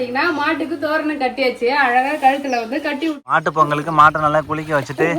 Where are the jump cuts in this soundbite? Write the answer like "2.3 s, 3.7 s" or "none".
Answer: 3.2 s